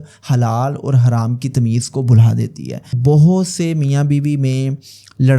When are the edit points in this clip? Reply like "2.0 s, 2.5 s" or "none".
3.0 s